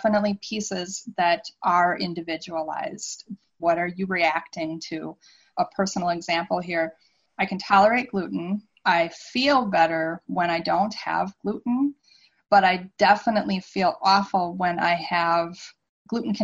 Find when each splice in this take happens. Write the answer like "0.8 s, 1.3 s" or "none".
3.5 s

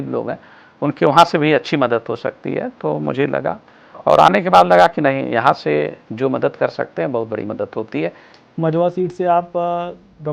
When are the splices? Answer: 8.3 s

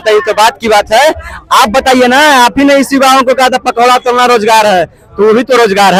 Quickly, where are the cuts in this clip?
none

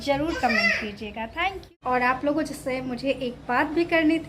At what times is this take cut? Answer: 1.7 s

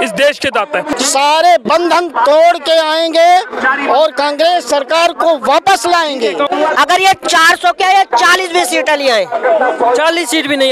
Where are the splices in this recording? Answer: 0.9 s, 6.5 s

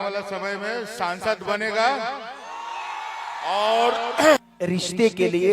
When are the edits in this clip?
4.4 s

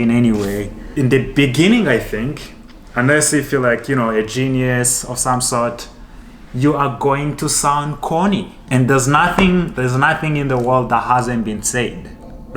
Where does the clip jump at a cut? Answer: 0.9 s, 8.6 s

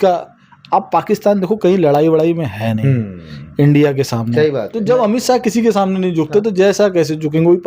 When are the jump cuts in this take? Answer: 4.8 s

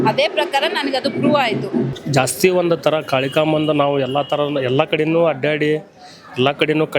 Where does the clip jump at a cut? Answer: 2.0 s

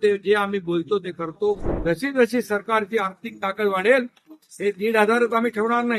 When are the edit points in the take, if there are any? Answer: 1.7 s

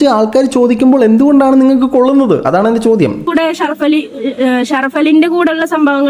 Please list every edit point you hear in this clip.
3.3 s

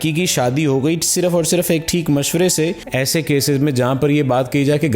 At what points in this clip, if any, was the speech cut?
2.8 s

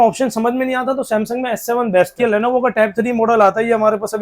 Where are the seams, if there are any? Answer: 2.2 s

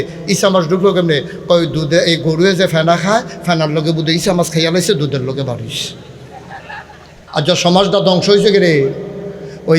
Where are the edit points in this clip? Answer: 7.2 s

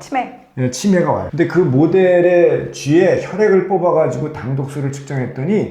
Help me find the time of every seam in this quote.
1.3 s

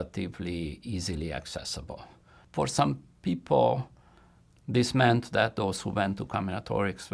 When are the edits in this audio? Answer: 2.3 s

